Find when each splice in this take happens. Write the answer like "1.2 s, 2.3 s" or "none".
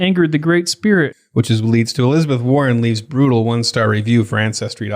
1.2 s